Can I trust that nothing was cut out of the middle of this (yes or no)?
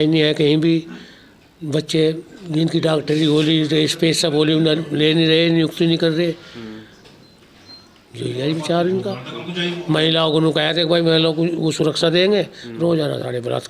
yes